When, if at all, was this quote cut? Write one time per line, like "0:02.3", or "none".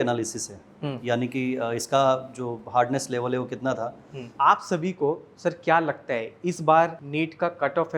0:04.3
0:07.0